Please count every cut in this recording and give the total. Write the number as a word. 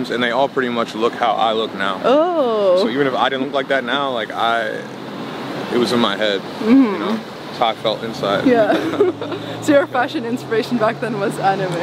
zero